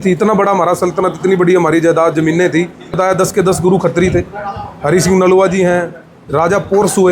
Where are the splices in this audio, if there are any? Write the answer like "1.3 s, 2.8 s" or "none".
3.0 s